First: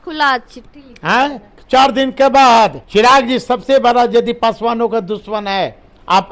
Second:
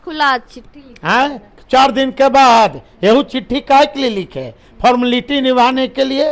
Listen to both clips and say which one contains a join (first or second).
first